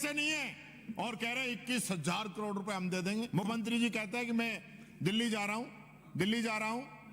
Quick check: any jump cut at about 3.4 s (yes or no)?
yes